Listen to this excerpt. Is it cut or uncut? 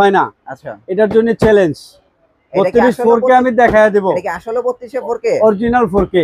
uncut